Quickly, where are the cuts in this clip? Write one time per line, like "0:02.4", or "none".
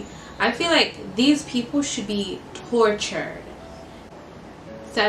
0:04.1